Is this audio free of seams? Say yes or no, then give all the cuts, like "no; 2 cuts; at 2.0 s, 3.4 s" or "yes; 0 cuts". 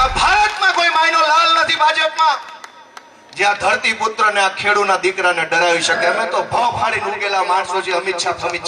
yes; 0 cuts